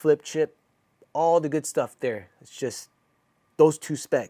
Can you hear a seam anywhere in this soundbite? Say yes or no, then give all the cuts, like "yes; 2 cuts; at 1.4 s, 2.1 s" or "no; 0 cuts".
no; 0 cuts